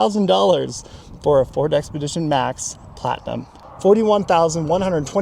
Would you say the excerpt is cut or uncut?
cut